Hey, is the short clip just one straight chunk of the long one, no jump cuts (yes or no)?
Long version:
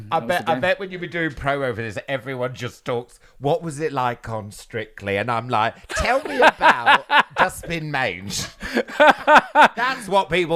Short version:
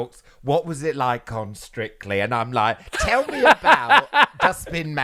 yes